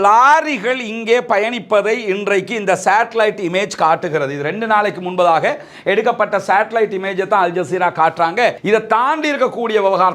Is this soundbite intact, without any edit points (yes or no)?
no